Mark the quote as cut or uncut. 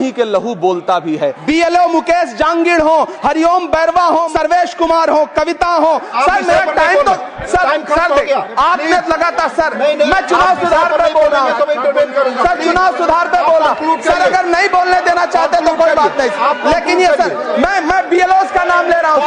cut